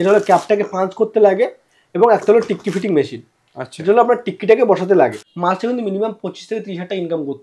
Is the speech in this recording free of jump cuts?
no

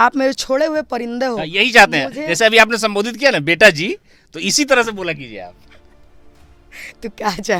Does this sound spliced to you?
no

